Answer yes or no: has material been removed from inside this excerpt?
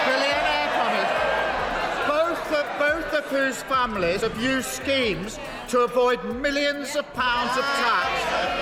no